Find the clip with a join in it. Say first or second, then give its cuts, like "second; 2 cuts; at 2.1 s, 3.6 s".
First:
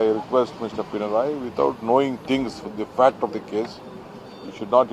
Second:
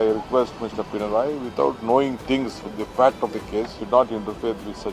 second; 1 cut; at 3.8 s